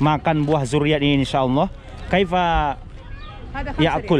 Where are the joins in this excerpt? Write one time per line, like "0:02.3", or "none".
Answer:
none